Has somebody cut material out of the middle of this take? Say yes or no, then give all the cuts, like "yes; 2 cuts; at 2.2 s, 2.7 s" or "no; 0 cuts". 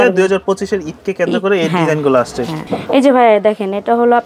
yes; 1 cut; at 2.7 s